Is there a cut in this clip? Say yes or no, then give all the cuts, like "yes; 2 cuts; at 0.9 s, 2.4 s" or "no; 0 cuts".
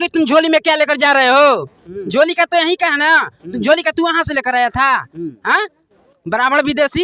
no; 0 cuts